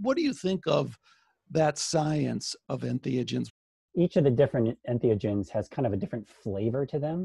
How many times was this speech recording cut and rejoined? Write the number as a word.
two